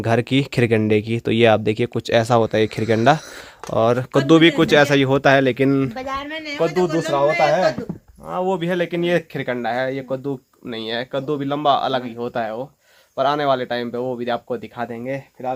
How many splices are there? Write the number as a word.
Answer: zero